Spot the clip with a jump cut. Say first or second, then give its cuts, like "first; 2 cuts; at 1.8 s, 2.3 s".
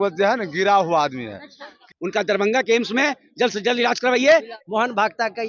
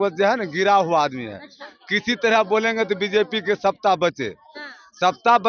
first; 2 cuts; at 1.9 s, 4.5 s